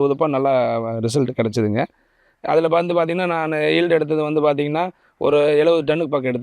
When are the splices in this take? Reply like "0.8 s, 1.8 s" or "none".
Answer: none

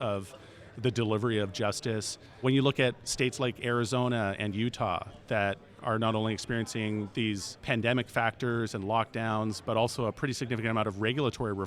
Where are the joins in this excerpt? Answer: 2.4 s, 7.4 s, 9.6 s

